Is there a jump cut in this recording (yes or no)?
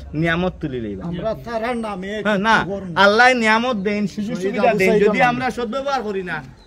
no